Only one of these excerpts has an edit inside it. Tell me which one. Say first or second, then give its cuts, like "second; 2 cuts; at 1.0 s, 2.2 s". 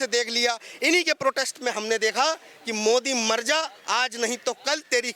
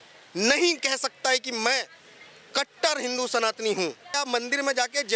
second; 1 cut; at 4.1 s